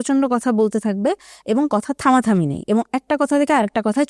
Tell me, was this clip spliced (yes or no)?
no